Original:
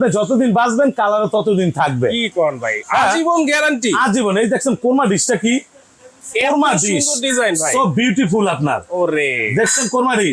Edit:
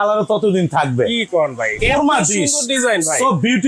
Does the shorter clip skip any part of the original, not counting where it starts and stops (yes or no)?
yes